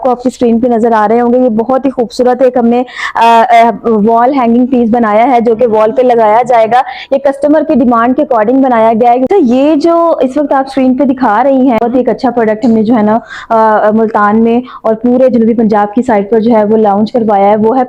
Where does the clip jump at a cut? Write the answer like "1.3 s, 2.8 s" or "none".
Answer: 9.3 s, 11.8 s